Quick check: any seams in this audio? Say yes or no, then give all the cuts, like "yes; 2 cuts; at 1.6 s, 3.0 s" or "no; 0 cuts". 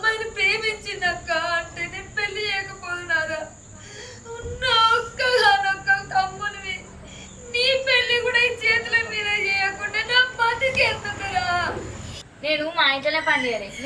yes; 1 cut; at 12.1 s